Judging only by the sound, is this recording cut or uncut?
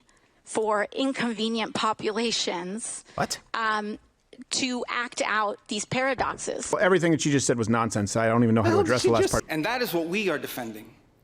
cut